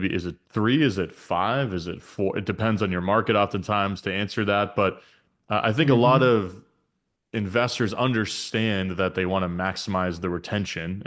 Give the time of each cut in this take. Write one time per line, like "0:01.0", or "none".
none